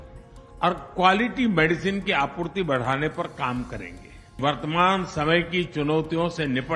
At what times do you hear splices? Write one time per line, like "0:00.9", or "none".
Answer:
0:04.4